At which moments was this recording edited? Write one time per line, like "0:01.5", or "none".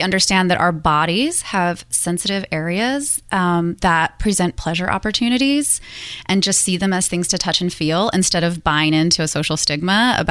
none